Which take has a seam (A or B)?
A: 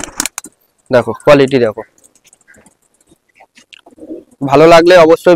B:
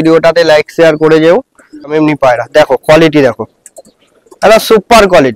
B